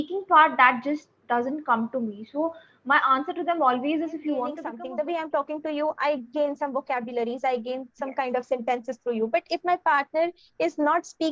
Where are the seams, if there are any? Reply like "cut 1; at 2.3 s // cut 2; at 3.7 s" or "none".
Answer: cut 1; at 4.7 s

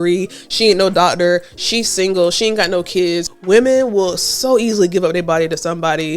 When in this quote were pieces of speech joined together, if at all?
cut 1; at 3.3 s

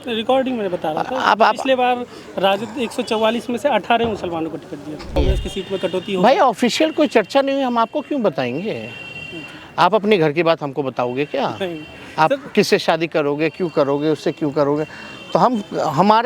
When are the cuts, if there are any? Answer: cut 1; at 5.2 s

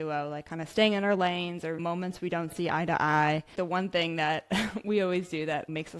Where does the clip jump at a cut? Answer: cut 1; at 3.5 s

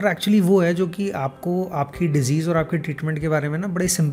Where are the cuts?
none

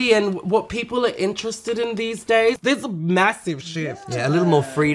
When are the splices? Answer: cut 1; at 2.6 s

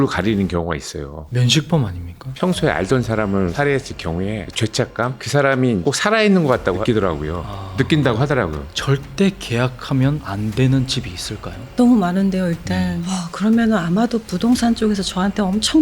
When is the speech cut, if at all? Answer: cut 1; at 2.3 s // cut 2; at 6.8 s // cut 3; at 8.7 s // cut 4; at 13.0 s

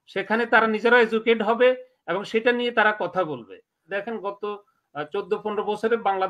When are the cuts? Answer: cut 1; at 3.9 s

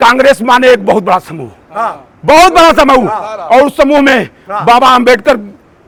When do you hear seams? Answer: none

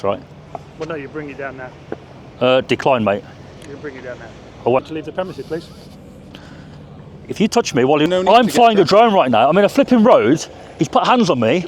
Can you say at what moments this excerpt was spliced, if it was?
cut 1; at 4.8 s // cut 2; at 8.1 s

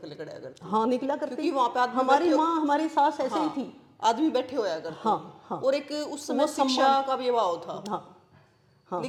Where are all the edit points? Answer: none

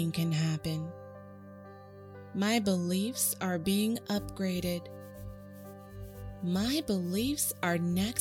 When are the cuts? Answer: cut 1; at 4.8 s // cut 2; at 6.4 s

